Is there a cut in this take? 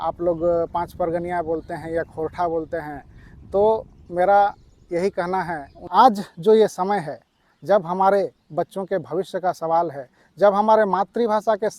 yes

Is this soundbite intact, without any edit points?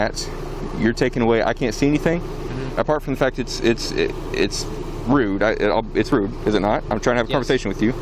yes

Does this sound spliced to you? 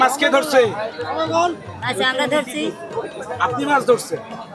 no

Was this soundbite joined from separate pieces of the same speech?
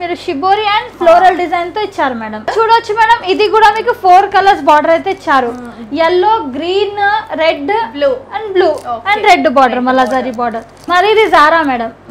yes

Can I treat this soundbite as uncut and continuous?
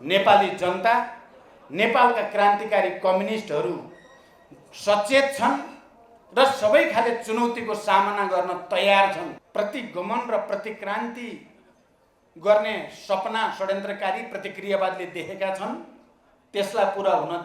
no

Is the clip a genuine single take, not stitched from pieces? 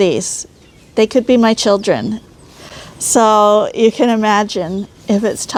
yes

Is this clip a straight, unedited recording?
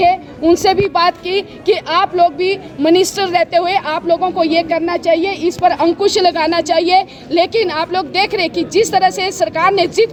yes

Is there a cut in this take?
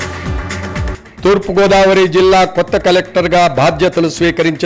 yes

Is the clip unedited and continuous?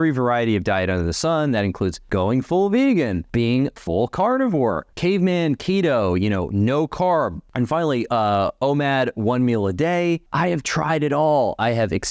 no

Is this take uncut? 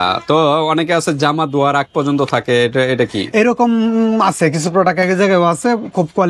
yes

